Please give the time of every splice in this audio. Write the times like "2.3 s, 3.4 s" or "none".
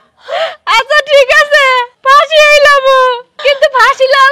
1.9 s, 3.3 s